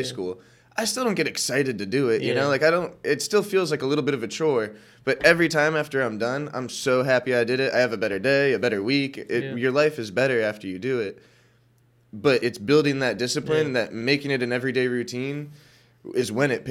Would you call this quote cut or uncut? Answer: uncut